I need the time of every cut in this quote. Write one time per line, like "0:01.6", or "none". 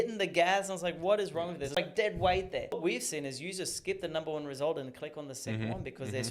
0:01.8
0:02.7